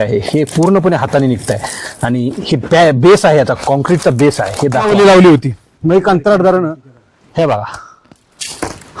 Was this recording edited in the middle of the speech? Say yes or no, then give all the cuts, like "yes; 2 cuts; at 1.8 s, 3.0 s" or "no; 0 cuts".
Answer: yes; 1 cut; at 4.9 s